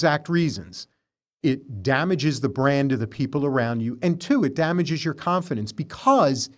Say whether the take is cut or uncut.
uncut